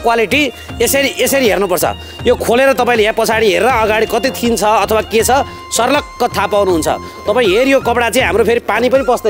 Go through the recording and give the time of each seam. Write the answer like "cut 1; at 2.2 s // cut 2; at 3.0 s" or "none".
none